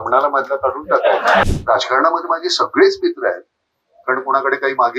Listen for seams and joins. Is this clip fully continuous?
no; 1 cut; at 1.4 s

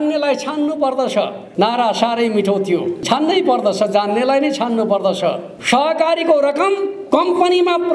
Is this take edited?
yes; 4 cuts; at 1.4 s, 3.0 s, 5.5 s, 6.9 s

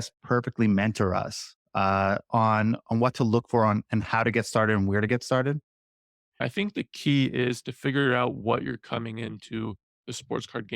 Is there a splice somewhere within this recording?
yes; 1 cut; at 6.4 s

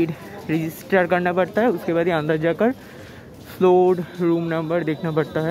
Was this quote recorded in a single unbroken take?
yes; 0 cuts

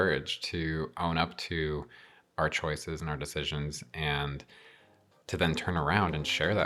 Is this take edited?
no; 0 cuts

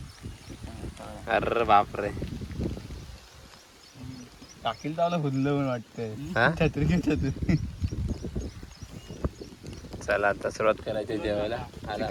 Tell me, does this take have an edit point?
no; 0 cuts

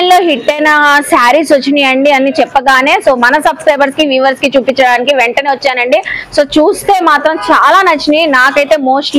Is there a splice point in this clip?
no; 0 cuts

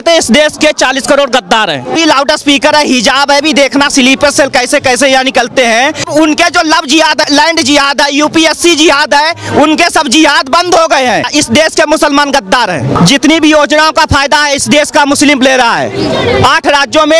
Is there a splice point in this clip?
yes; 4 cuts; at 1.9 s, 6.1 s, 11.3 s, 13.0 s

